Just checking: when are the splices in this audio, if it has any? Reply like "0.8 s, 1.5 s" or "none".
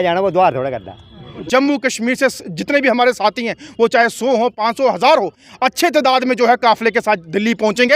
1.3 s